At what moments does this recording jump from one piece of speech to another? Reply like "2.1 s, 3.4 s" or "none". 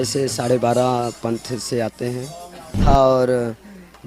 2.7 s